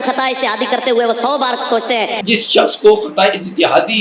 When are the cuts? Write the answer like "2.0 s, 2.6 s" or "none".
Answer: 2.2 s